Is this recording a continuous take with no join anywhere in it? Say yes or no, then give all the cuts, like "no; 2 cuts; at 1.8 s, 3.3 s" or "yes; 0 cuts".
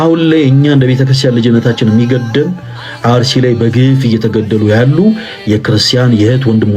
yes; 0 cuts